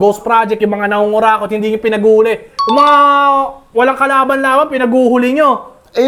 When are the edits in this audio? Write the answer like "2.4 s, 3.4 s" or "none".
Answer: none